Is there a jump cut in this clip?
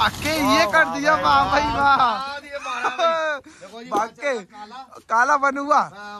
no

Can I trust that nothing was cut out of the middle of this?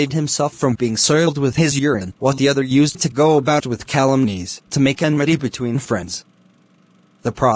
no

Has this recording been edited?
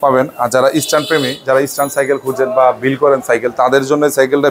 no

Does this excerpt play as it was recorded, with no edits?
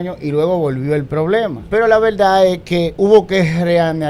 no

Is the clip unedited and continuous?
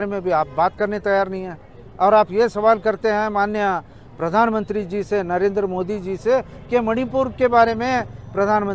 yes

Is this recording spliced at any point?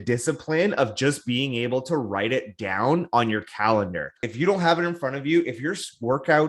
yes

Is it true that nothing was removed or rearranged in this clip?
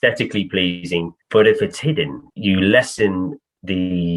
no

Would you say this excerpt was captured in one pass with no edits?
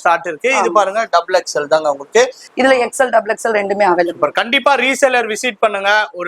no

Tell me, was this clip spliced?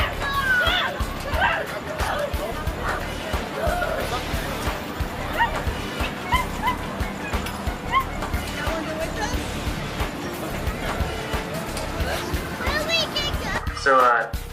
yes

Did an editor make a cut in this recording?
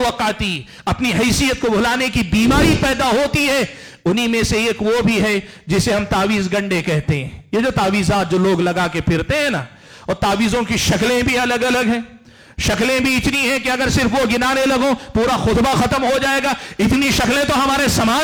no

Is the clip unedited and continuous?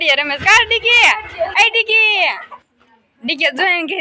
yes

